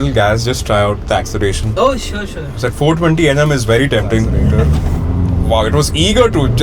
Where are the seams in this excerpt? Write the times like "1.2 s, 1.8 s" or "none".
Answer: 4.3 s